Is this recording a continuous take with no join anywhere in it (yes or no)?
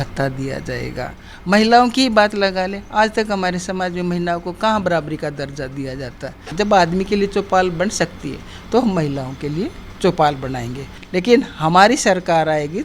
no